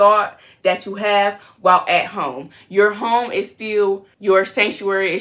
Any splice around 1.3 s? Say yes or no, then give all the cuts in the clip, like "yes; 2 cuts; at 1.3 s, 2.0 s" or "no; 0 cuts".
no; 1 cut; at 4.1 s